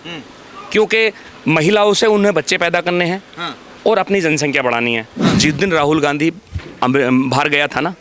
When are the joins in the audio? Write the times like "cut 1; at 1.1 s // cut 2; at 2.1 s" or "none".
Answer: cut 1; at 5.2 s